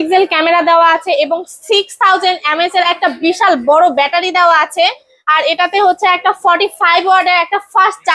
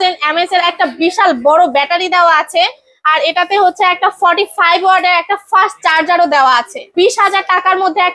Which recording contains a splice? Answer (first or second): second